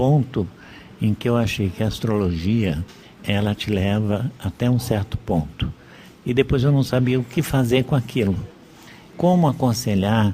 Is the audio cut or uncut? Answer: cut